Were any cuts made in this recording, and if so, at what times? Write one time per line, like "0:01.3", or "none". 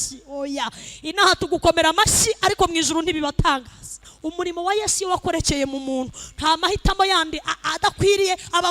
0:04.1